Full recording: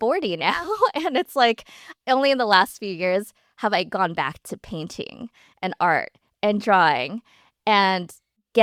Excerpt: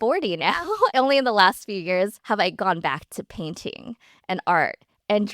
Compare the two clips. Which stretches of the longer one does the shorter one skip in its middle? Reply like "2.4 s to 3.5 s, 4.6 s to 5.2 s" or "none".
0.9 s to 2.0 s, 3.3 s to 3.5 s